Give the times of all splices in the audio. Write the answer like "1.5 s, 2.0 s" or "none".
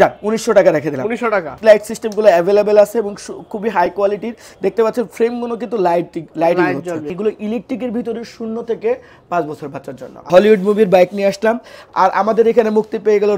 1.5 s, 7.1 s, 10.2 s